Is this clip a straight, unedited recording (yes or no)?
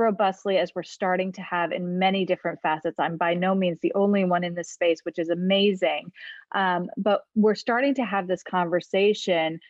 yes